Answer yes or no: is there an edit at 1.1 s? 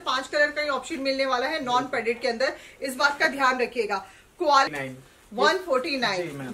no